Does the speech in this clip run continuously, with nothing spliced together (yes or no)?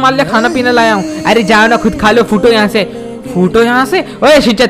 yes